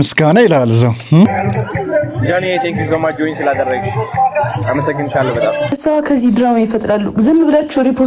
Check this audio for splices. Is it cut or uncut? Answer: cut